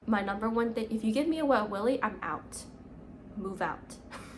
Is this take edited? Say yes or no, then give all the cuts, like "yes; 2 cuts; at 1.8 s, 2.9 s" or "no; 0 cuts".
no; 0 cuts